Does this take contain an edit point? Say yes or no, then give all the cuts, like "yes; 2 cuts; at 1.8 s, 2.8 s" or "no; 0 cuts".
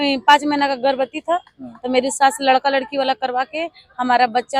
no; 0 cuts